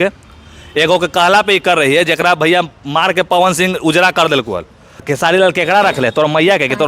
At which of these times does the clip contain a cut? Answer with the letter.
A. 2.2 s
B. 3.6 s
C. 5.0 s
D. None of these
C